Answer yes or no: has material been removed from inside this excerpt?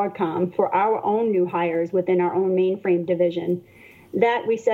no